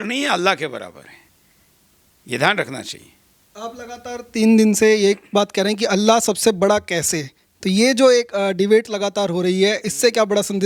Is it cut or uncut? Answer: uncut